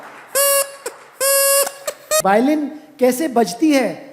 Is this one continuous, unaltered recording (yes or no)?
no